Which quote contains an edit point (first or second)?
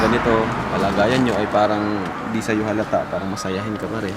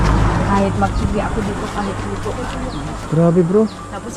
second